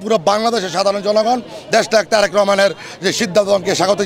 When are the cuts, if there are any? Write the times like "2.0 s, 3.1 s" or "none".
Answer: none